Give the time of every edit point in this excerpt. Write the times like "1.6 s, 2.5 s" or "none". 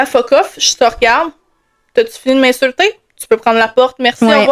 none